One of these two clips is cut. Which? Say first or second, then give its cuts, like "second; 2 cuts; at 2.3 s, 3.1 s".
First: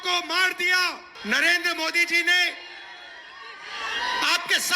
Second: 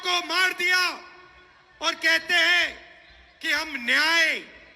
first; 1 cut; at 1.1 s